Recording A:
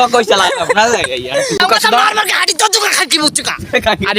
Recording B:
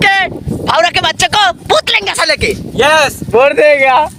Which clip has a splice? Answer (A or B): A